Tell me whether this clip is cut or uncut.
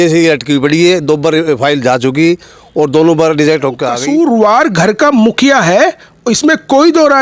cut